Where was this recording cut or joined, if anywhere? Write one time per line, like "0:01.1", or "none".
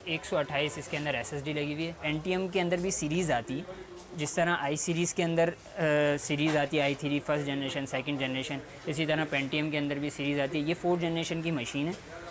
0:02.0